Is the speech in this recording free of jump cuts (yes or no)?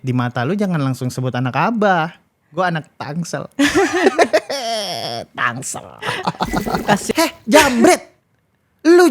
no